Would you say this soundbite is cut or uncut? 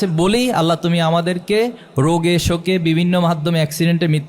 uncut